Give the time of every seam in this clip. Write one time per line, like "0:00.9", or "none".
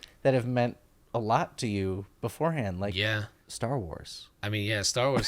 0:03.4